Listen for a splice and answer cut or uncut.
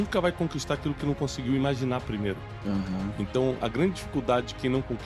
uncut